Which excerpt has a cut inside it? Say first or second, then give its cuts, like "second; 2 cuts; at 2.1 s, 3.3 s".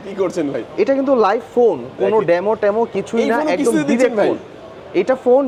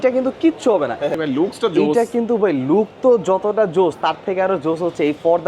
second; 1 cut; at 1.2 s